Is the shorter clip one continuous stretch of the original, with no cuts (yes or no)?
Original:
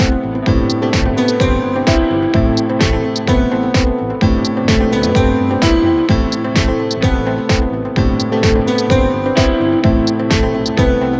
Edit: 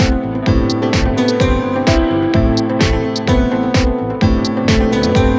yes